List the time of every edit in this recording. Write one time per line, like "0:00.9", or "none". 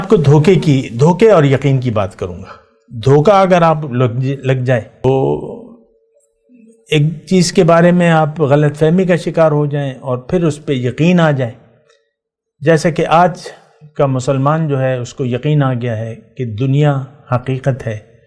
0:05.0

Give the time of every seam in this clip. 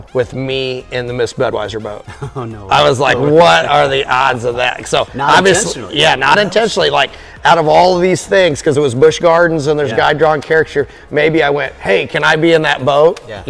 none

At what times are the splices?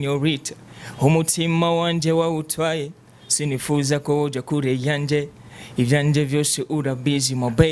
none

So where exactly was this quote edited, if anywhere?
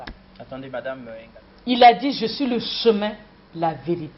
0:01.2

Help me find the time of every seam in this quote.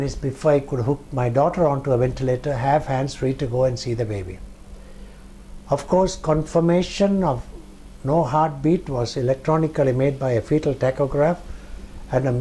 none

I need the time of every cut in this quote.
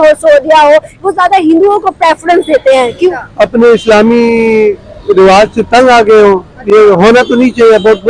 0:03.2

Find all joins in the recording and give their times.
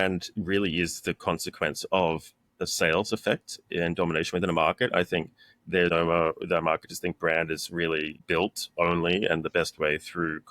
0:05.9
0:08.2

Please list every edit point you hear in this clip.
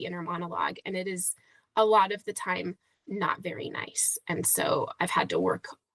none

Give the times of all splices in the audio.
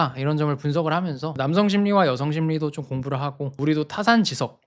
0:01.3
0:03.5

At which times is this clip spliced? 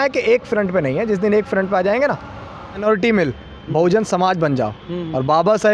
0:02.8

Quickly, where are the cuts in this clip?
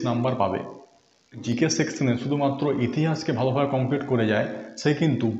0:01.4

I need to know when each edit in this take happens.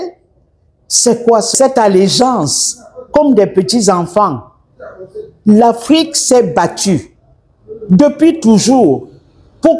0:01.5

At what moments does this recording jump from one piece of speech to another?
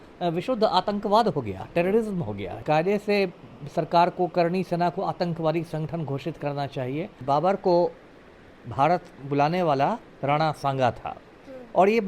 0:02.6
0:07.2

